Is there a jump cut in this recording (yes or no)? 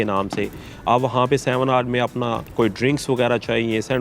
yes